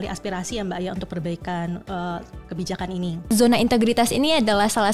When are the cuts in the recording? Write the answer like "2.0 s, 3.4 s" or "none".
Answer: 3.3 s